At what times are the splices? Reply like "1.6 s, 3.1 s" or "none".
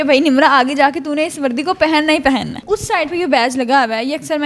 2.6 s